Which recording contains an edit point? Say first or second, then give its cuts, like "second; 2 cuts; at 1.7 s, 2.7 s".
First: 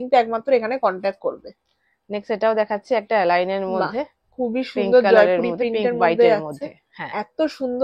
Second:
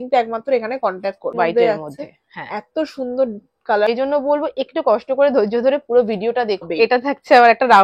second; 3 cuts; at 1.3 s, 3.9 s, 6.7 s